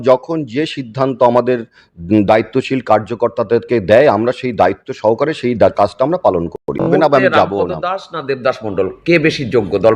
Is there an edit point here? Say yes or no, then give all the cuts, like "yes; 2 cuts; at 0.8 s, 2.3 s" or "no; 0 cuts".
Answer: yes; 1 cut; at 6.9 s